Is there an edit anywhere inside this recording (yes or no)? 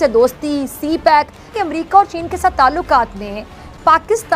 yes